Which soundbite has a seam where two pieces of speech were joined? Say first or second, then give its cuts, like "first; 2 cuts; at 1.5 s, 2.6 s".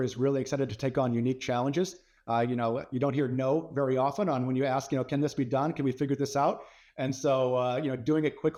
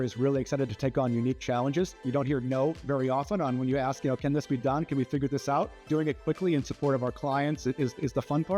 second; 2 cuts; at 2.0 s, 5.8 s